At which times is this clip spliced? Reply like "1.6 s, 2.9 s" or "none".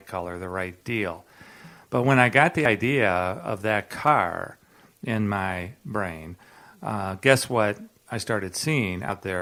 none